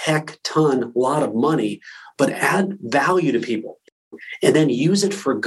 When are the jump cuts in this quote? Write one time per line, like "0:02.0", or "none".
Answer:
0:04.1